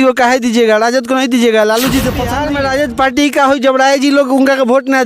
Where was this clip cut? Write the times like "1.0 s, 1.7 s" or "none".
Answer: 2.3 s